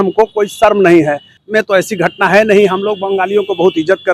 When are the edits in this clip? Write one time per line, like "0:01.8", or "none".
0:01.4